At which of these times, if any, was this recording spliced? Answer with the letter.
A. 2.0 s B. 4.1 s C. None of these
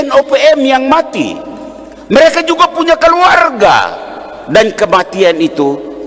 C